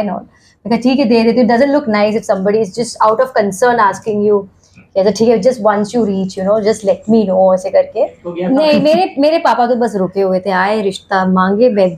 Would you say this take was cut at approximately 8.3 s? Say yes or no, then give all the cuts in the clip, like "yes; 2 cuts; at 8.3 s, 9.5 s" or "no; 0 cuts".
yes; 1 cut; at 8.3 s